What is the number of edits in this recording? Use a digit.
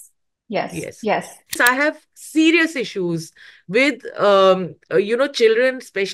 1